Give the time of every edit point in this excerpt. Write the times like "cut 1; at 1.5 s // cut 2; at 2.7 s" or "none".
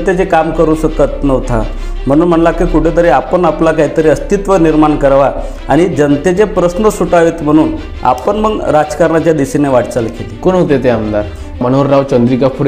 cut 1; at 11.5 s